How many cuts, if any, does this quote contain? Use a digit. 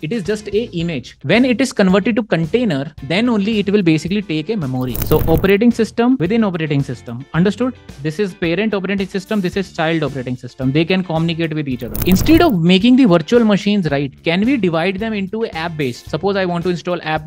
2